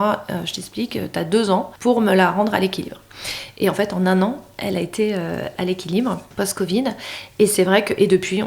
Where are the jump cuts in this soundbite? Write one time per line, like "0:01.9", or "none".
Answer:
0:01.7
0:05.5
0:06.3

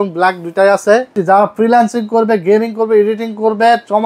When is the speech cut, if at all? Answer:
0:01.1

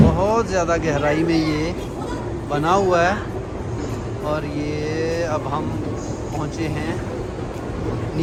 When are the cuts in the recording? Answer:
none

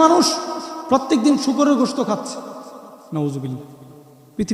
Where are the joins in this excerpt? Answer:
none

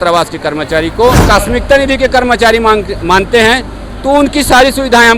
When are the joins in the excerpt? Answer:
0:01.3

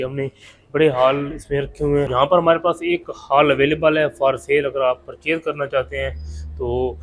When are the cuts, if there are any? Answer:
0:02.1

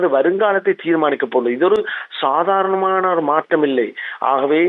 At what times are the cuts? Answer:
none

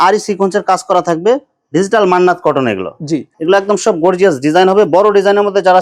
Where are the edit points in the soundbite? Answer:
0:03.3

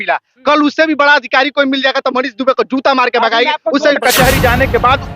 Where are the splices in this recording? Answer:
0:04.0

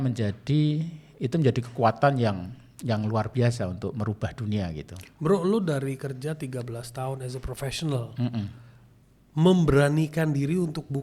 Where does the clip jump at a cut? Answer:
none

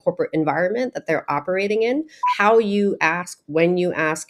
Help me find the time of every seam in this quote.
0:02.2

